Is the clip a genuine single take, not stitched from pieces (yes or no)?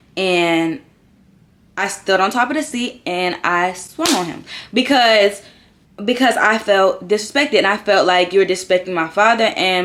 yes